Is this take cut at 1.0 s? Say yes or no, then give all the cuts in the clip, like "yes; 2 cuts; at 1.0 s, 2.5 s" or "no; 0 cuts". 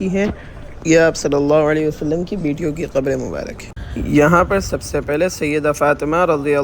no; 1 cut; at 3.7 s